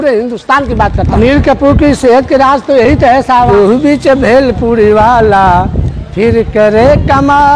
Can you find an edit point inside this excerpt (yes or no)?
yes